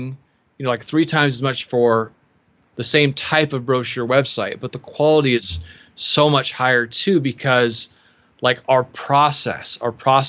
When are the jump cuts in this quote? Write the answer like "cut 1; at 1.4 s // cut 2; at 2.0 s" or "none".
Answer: none